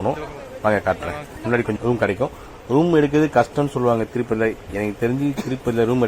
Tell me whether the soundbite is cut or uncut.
cut